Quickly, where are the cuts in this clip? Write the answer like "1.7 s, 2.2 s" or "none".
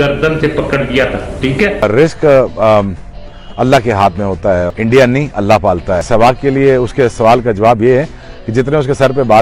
1.8 s, 4.7 s, 6.1 s